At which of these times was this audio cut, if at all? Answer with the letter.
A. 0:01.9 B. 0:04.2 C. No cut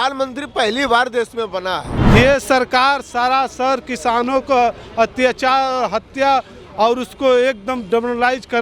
A